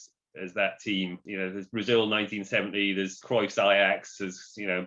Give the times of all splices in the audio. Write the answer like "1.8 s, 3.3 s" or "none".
1.2 s, 3.2 s